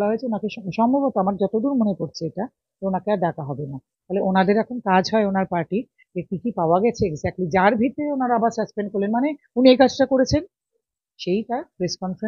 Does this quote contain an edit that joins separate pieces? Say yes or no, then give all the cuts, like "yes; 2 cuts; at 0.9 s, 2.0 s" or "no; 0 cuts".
no; 0 cuts